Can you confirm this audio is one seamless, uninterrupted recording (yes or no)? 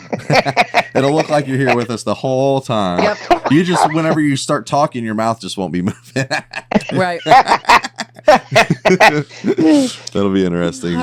yes